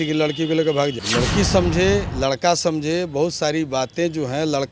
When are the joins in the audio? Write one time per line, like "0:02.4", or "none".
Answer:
0:01.0